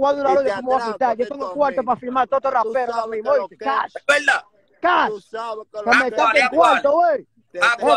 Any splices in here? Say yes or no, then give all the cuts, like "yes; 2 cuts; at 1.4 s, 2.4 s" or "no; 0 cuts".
no; 0 cuts